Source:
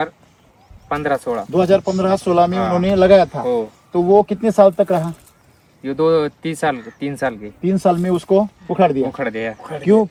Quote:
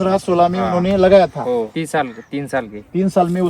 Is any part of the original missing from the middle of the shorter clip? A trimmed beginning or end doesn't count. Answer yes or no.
yes